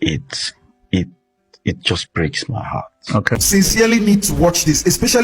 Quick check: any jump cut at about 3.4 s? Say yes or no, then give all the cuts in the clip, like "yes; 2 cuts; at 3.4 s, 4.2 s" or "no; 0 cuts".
yes; 1 cut; at 3.4 s